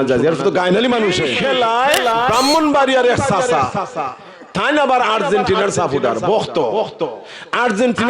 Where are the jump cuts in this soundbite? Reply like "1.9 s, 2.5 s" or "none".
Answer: 1.3 s